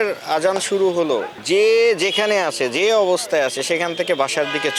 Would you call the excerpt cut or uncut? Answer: uncut